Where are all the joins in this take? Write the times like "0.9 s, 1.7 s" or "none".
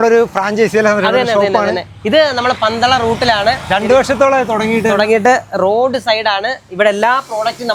none